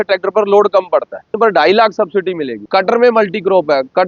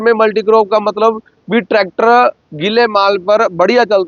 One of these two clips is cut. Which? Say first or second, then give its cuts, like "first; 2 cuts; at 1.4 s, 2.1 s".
first; 2 cuts; at 1.3 s, 2.5 s